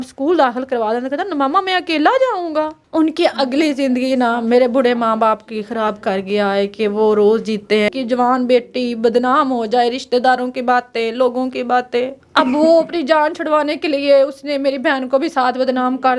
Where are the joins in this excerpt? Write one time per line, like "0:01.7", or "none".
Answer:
0:02.8
0:07.9
0:12.2